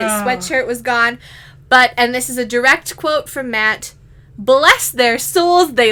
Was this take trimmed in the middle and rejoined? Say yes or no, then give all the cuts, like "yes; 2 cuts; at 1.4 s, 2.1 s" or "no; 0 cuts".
no; 0 cuts